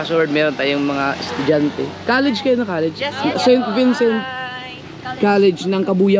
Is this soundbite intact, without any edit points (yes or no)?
yes